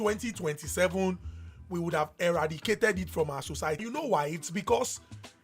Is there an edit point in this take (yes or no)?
yes